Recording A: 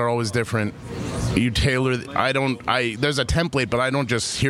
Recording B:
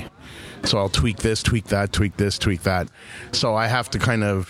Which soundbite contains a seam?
B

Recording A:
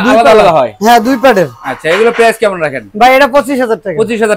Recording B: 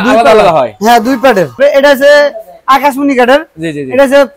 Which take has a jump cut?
B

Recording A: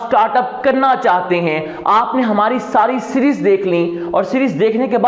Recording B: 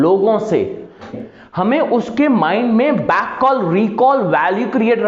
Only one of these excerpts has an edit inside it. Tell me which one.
B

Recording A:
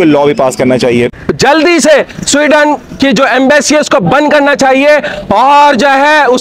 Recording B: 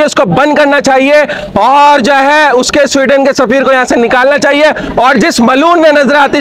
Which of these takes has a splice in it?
A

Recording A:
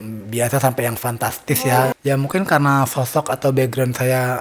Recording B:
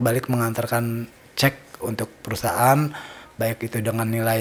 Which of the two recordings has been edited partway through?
A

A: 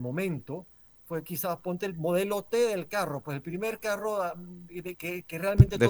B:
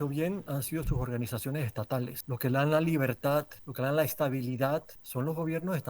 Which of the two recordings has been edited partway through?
B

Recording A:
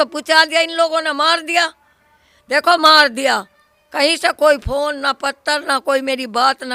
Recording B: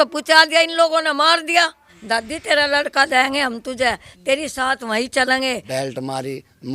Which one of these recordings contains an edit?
B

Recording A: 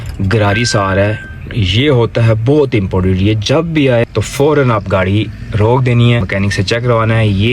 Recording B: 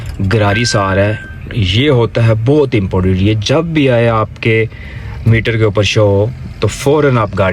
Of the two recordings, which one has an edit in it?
A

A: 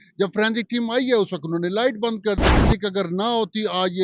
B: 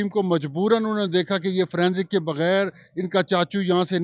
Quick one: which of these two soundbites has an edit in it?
A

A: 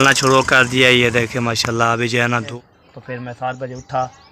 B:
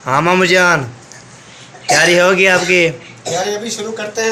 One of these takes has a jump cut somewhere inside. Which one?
A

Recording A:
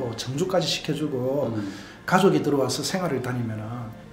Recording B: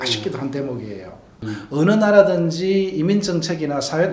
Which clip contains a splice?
B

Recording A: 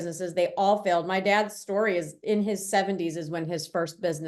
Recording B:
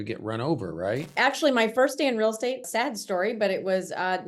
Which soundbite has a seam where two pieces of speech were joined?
B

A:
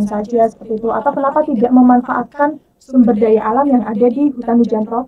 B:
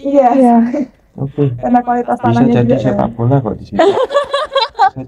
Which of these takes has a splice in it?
B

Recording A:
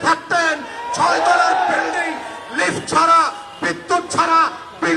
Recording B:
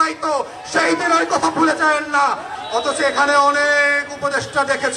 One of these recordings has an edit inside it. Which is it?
B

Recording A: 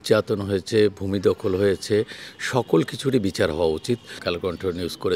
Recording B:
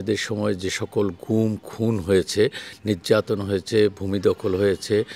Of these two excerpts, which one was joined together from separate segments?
A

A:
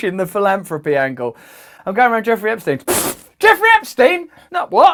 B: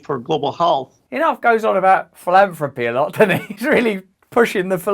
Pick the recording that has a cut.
B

